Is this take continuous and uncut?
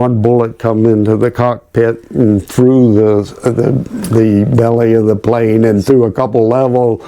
yes; 0 cuts

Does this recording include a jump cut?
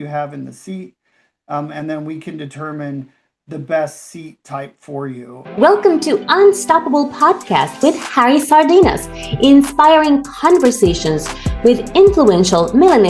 yes; 1 cut; at 5.4 s

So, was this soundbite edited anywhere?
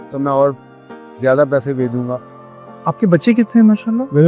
yes; 1 cut; at 2.2 s

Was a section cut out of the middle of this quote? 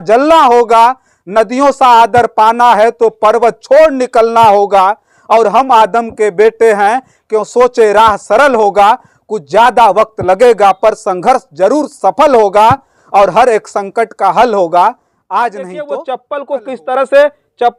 yes; 1 cut; at 15.8 s

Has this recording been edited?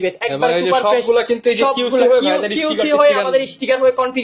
no; 0 cuts

